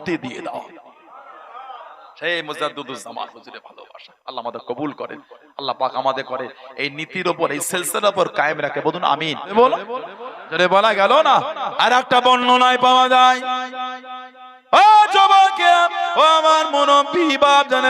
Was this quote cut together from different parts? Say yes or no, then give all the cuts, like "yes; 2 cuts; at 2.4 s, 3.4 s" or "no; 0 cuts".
yes; 1 cut; at 9.5 s